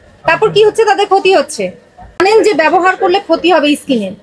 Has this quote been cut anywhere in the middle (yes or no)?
yes